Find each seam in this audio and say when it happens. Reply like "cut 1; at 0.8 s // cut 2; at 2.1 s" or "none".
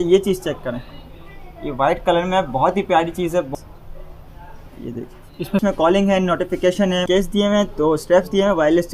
cut 1; at 3.5 s // cut 2; at 5.6 s // cut 3; at 7.0 s